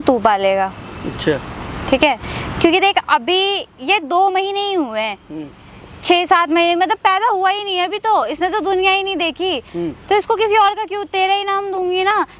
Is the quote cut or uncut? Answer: uncut